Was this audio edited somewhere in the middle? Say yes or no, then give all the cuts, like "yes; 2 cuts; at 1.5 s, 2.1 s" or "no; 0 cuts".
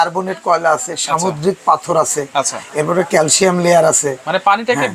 no; 0 cuts